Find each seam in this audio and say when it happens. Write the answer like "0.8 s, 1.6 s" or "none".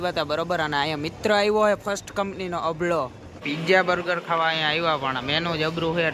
3.3 s